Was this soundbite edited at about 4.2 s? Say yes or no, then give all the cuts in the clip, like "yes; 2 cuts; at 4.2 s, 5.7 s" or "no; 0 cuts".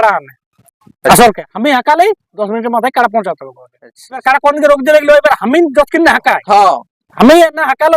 yes; 1 cut; at 4.2 s